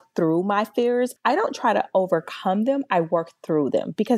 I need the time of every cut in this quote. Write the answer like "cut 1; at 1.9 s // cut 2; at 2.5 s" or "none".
cut 1; at 1.2 s